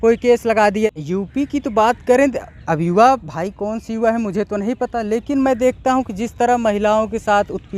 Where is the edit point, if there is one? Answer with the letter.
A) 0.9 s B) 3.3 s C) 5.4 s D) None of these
A